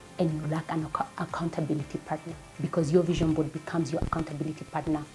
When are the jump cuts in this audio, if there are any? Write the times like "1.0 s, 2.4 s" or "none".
none